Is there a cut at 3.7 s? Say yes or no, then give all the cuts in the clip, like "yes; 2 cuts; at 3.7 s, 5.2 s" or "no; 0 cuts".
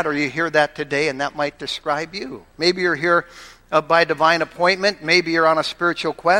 no; 0 cuts